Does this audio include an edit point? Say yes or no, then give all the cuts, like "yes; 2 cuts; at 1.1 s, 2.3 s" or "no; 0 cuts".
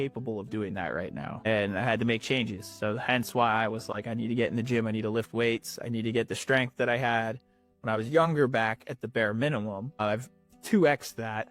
no; 0 cuts